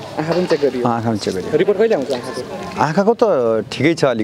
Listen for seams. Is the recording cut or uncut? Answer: uncut